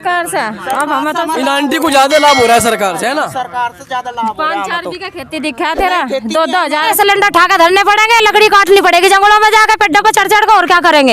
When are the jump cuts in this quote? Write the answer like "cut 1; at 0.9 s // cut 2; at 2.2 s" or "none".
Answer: cut 1; at 6.8 s